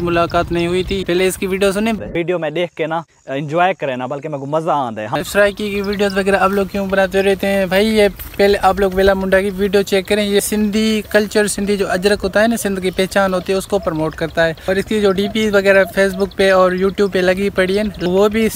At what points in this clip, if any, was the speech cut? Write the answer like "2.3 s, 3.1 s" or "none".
1.0 s, 5.1 s